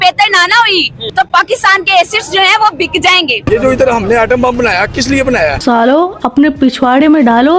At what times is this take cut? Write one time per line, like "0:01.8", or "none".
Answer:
0:01.0
0:03.5
0:05.6

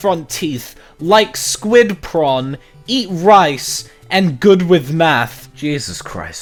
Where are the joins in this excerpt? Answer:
none

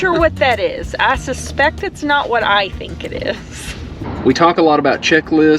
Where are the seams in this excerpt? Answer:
0:04.1

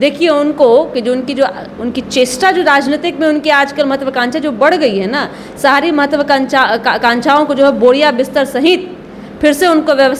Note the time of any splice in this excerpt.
none

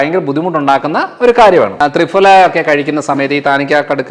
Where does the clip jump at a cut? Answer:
0:01.7

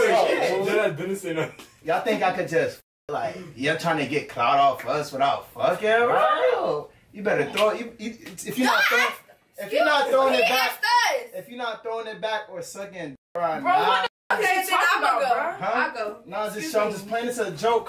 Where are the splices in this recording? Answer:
none

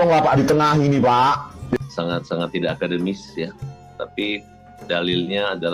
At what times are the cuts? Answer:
0:01.8

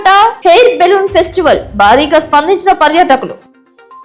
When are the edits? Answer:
none

